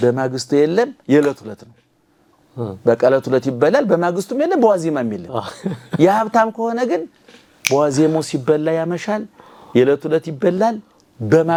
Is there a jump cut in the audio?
no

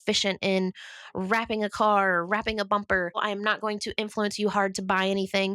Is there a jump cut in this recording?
yes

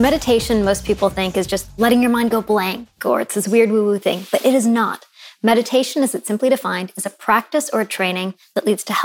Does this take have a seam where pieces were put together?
no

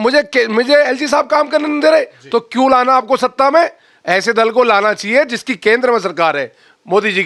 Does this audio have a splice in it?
no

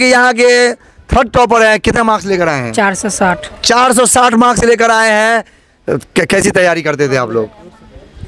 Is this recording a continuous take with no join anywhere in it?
yes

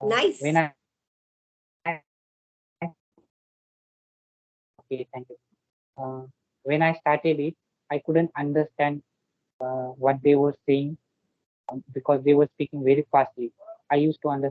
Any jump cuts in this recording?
no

